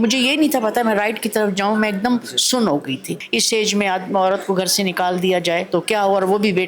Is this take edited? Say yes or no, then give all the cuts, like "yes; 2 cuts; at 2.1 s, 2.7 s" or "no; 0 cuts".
yes; 2 cuts; at 3.2 s, 5.7 s